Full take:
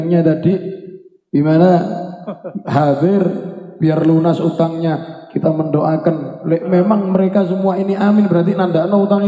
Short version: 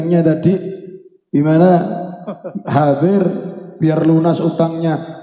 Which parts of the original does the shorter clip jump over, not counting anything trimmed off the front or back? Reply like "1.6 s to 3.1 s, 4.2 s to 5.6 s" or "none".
none